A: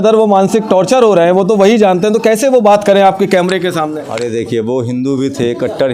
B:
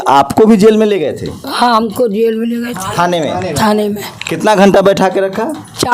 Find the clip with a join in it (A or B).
A